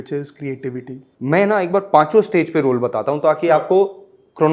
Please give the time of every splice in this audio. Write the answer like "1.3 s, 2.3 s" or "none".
1.1 s